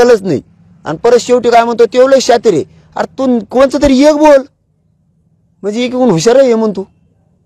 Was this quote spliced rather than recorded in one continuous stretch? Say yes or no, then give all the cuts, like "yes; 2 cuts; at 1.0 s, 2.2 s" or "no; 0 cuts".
no; 0 cuts